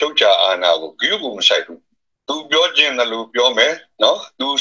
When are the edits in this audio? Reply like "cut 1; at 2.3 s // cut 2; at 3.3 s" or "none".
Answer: none